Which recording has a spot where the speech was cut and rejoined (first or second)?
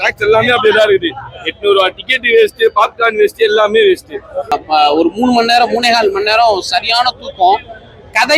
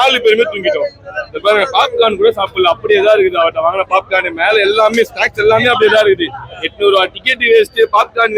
first